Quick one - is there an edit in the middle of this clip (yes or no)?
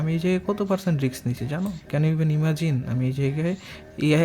yes